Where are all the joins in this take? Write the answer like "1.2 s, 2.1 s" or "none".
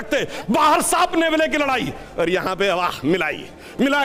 none